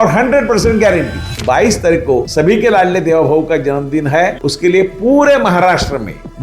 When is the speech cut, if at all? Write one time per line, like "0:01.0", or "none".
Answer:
0:01.3
0:02.3